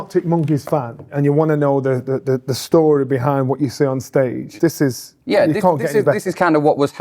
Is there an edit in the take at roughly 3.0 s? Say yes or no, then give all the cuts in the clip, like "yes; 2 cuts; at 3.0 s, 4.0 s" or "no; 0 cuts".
no; 2 cuts; at 1.1 s, 4.5 s